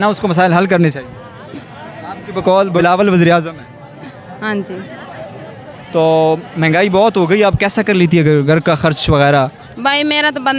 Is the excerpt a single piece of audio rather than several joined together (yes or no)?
no